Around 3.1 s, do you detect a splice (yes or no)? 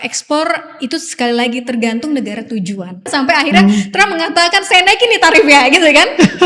yes